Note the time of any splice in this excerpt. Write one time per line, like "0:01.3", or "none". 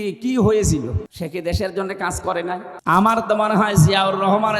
0:01.1
0:02.7